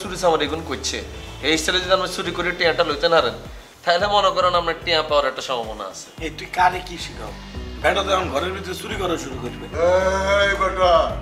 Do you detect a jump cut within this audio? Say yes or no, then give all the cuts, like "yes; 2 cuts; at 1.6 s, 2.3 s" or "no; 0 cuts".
no; 0 cuts